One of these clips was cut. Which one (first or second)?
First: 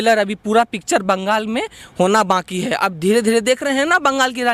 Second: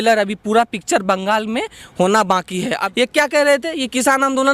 second